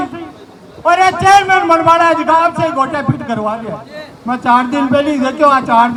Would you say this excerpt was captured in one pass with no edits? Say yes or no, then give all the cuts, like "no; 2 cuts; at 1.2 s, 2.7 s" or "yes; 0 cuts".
yes; 0 cuts